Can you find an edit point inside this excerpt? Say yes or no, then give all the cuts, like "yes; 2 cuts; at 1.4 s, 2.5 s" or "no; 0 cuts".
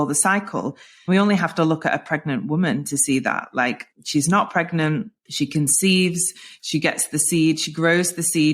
yes; 2 cuts; at 3.9 s, 5.2 s